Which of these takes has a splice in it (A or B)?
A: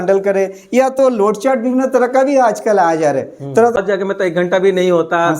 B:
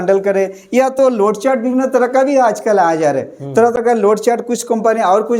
A